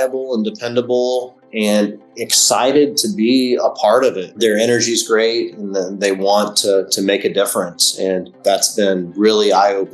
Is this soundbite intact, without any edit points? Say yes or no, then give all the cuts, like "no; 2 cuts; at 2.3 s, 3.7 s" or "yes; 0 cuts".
no; 2 cuts; at 4.3 s, 8.4 s